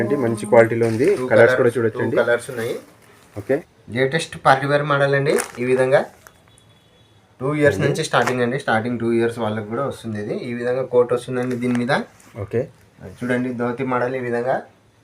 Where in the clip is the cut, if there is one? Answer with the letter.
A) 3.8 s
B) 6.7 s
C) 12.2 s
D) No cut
A